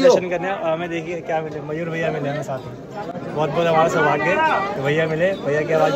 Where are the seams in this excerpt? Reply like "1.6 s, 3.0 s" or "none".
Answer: none